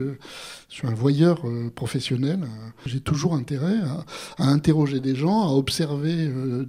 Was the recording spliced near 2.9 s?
yes; 1 cut; at 2.9 s

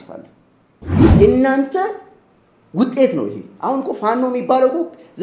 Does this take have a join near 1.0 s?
yes; 1 cut; at 1.0 s

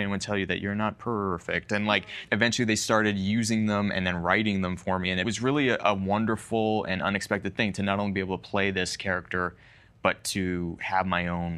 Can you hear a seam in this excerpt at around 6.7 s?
no; 2 cuts; at 2.2 s, 5.2 s

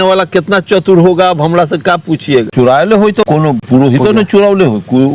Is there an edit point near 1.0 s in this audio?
no; 2 cuts; at 2.5 s, 3.6 s

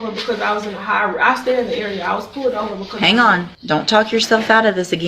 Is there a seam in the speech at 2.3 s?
no; 1 cut; at 3.5 s

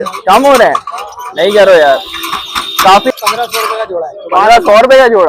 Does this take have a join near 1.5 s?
no; 1 cut; at 3.1 s

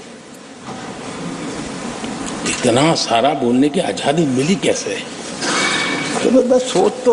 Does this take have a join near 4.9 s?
no; 0 cuts

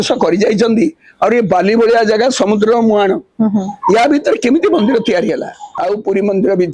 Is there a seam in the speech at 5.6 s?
yes; 1 cut; at 5.6 s

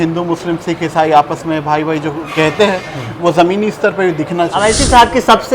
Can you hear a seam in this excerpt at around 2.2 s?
no; 1 cut; at 4.6 s

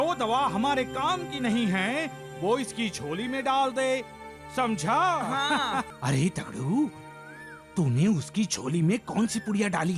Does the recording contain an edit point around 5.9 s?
yes; 1 cut; at 5.9 s

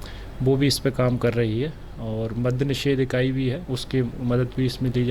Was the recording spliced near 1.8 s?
no; 0 cuts

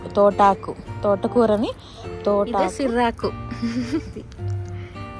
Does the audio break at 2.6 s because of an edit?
yes; 1 cut; at 2.6 s

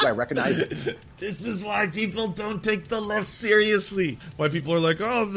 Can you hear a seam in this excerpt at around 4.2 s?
yes; 1 cut; at 4.2 s

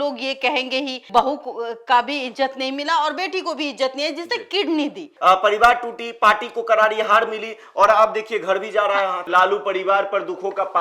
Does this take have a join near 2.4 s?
no; 3 cuts; at 1.0 s, 5.1 s, 9.3 s

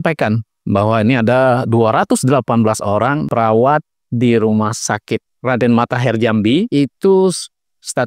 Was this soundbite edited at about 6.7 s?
yes; 2 cuts; at 3.3 s, 6.7 s

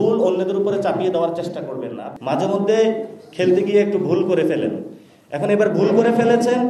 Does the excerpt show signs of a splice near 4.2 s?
no; 1 cut; at 2.1 s

